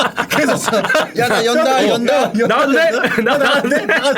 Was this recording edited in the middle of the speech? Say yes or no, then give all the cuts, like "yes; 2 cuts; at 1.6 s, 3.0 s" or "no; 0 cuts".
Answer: yes; 1 cut; at 1.1 s